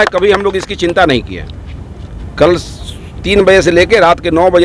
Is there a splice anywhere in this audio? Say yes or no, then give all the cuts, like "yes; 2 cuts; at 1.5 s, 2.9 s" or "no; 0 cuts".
no; 0 cuts